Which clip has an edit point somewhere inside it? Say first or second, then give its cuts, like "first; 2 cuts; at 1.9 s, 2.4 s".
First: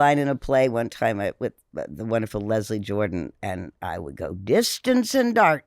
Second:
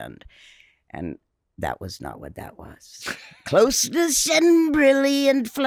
first; 1 cut; at 3.3 s